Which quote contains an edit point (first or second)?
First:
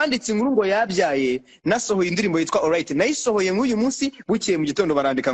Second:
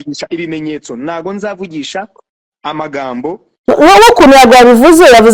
second